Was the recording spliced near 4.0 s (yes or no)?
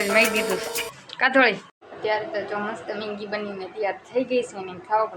no